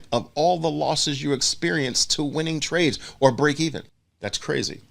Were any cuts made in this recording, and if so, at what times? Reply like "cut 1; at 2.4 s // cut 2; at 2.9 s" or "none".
cut 1; at 4.0 s